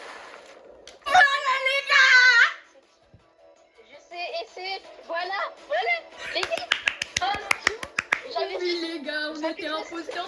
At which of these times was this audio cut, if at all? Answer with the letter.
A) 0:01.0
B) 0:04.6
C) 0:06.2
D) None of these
A